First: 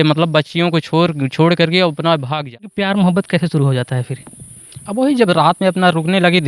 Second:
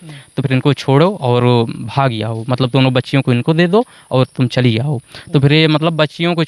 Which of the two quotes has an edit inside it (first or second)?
first